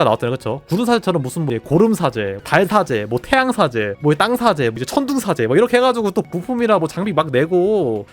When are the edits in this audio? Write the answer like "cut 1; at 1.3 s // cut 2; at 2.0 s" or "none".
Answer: none